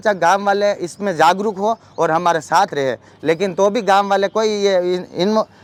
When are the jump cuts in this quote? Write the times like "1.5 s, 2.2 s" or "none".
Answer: none

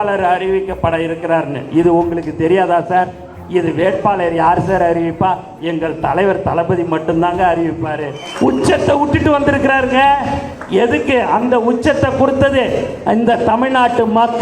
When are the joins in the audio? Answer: 8.2 s

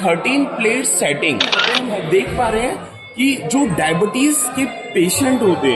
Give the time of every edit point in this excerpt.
1.8 s

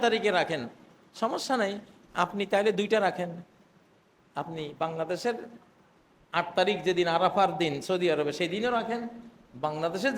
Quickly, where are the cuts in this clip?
none

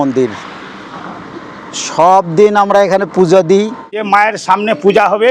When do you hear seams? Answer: 3.5 s

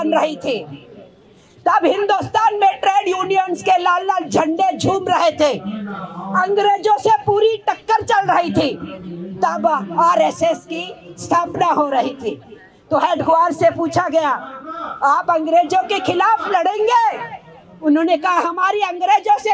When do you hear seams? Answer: none

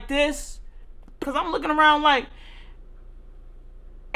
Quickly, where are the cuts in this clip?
1.2 s

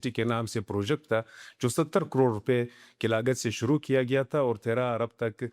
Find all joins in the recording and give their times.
none

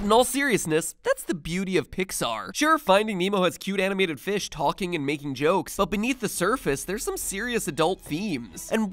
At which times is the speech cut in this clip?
4.5 s

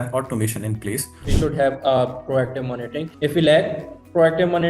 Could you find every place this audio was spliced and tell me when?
1.2 s, 3.0 s

